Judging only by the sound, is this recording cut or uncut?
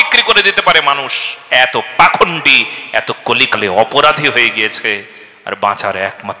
uncut